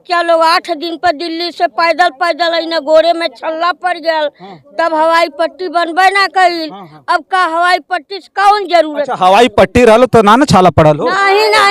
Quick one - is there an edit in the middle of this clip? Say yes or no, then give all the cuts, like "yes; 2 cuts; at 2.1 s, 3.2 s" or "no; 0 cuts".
no; 0 cuts